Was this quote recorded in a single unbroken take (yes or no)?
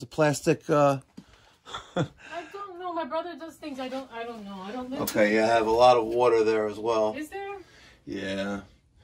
yes